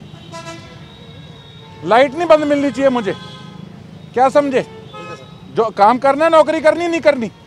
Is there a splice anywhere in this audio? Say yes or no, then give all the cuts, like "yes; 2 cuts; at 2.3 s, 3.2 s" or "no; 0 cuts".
no; 0 cuts